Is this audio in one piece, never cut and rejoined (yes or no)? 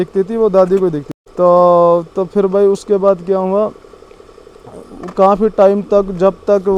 yes